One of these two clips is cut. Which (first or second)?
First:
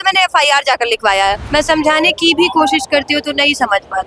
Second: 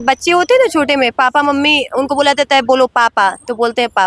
first